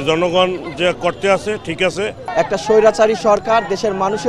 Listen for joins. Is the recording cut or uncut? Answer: cut